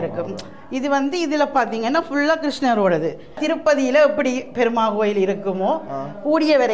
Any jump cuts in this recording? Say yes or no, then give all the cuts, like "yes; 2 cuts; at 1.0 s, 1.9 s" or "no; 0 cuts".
yes; 1 cut; at 3.4 s